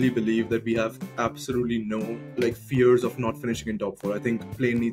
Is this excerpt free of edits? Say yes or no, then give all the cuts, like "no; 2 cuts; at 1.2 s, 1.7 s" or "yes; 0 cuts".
yes; 0 cuts